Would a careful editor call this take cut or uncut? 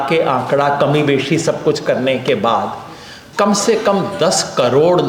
uncut